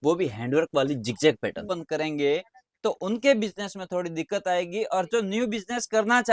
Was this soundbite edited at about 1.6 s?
yes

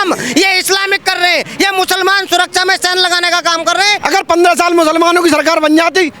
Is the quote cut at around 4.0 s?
yes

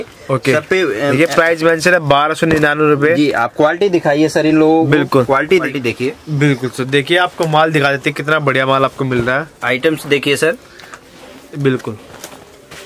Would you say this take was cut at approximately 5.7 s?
yes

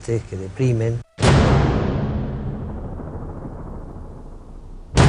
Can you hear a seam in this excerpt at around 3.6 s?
no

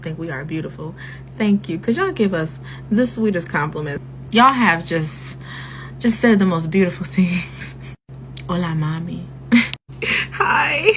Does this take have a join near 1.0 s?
no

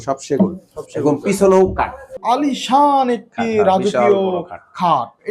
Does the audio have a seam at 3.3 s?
no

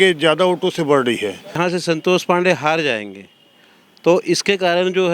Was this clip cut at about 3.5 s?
no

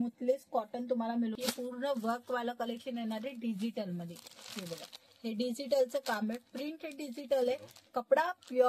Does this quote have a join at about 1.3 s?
yes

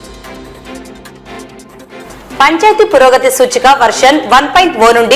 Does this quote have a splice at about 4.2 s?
no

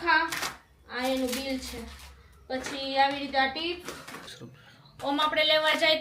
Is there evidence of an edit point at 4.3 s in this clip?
yes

